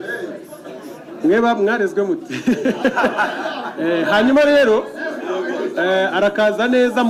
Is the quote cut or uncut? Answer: uncut